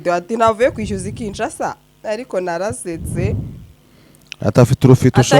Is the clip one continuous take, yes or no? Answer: yes